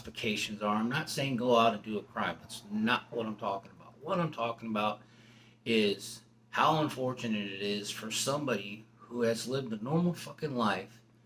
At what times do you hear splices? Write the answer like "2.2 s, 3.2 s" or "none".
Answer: none